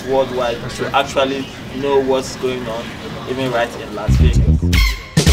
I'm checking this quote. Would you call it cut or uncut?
cut